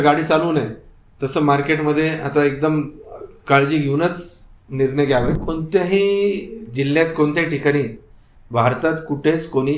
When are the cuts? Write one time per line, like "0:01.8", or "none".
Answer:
0:05.4